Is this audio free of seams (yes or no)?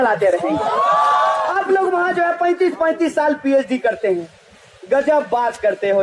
no